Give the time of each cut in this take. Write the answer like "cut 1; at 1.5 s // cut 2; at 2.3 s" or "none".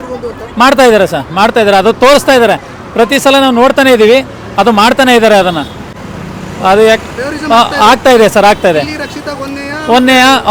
none